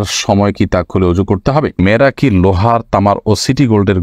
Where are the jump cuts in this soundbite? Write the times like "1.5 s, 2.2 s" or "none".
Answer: 1.8 s